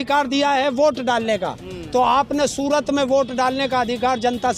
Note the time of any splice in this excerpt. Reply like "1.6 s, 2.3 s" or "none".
none